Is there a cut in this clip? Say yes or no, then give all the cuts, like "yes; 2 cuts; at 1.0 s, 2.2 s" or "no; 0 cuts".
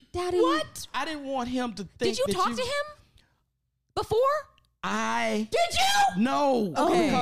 yes; 1 cut; at 0.9 s